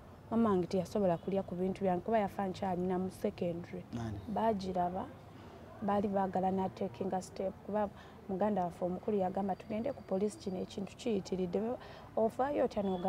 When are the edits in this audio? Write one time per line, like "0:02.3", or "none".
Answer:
0:03.8